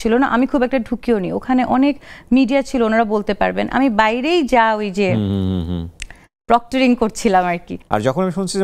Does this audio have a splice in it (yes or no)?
yes